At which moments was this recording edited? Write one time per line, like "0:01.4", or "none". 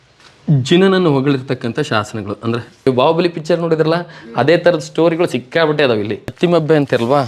0:02.7
0:06.3